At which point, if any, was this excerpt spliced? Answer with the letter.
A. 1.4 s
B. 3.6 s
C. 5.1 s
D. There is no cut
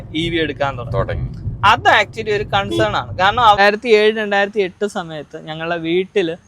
B